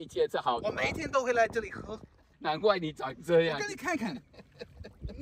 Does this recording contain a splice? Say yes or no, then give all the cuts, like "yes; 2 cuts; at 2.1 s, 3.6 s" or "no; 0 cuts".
yes; 1 cut; at 2.3 s